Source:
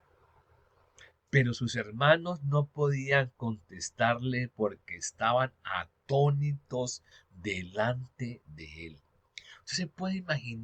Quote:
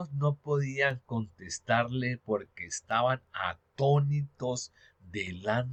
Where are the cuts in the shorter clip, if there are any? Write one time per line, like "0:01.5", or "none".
none